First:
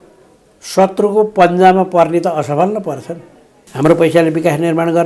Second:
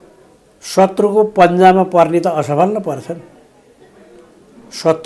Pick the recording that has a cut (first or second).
first